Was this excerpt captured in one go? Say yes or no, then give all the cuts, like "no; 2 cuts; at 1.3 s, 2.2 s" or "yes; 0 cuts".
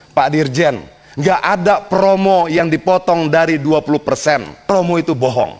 no; 1 cut; at 4.6 s